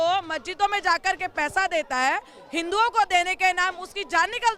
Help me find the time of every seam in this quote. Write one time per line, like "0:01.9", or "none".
none